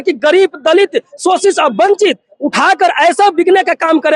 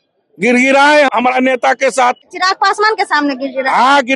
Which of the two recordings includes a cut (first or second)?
second